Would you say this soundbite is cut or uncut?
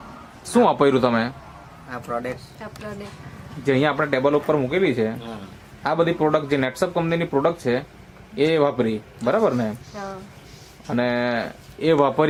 uncut